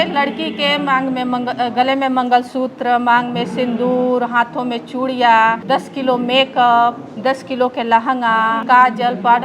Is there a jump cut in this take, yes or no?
yes